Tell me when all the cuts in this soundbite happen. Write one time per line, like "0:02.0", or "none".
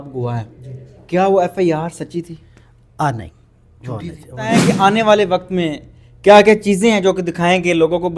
0:04.6